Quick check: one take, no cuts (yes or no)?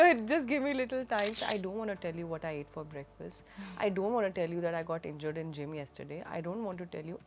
no